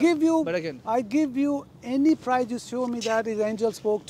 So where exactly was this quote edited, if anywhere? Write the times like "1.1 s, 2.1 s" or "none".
none